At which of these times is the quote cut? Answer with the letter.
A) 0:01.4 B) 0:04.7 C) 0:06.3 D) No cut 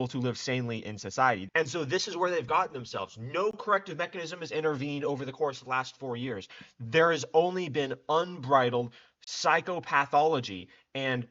A